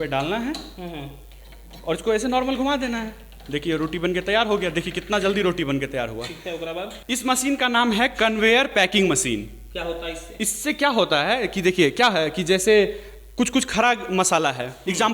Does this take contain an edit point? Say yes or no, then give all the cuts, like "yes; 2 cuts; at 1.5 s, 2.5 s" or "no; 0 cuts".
yes; 1 cut; at 6.9 s